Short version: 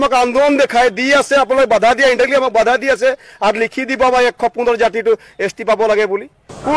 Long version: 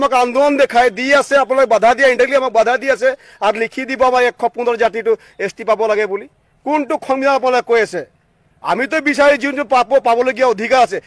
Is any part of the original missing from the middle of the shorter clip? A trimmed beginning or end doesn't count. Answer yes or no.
no